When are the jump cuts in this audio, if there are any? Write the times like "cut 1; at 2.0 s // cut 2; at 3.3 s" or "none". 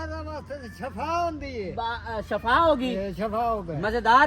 none